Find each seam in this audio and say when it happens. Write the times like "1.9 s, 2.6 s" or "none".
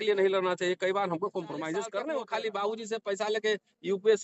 2.1 s